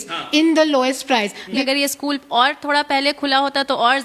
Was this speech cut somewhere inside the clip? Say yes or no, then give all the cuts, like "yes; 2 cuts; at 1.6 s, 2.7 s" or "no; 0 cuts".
yes; 1 cut; at 1.6 s